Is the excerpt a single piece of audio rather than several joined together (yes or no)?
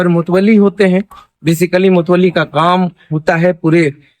yes